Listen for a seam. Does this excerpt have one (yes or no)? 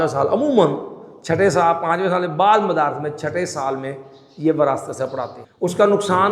yes